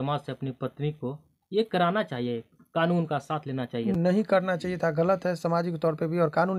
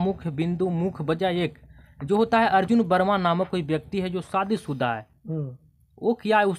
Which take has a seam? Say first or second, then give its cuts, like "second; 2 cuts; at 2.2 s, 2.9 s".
first; 1 cut; at 3.9 s